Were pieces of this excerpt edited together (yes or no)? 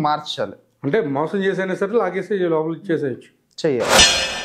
no